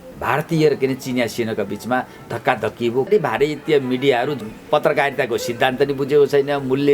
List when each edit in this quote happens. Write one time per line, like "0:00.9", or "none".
0:03.1
0:04.4

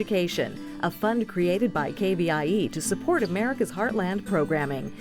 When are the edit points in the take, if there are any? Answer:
none

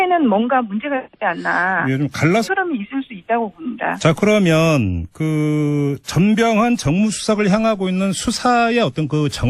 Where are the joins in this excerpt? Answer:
none

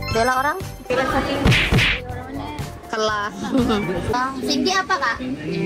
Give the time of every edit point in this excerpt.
0:04.1

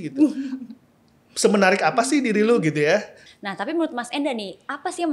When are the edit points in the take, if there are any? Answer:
0:03.2

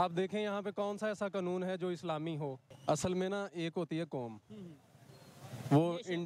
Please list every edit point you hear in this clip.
0:02.7

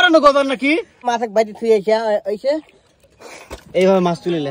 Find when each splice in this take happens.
0:01.0

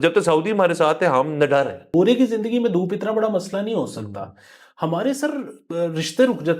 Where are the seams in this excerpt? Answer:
0:01.9

